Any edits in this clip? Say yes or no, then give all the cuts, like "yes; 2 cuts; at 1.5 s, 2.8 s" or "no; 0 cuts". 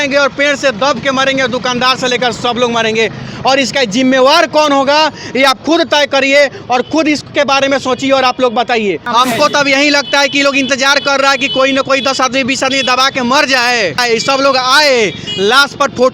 yes; 2 cuts; at 9.0 s, 14.0 s